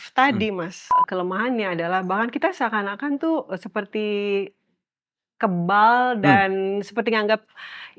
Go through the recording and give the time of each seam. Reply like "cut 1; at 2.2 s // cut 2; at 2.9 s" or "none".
cut 1; at 0.9 s